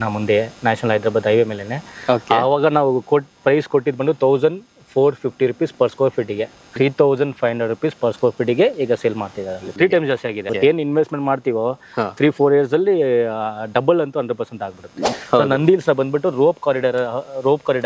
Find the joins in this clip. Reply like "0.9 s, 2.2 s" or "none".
6.6 s, 9.6 s, 10.4 s, 15.0 s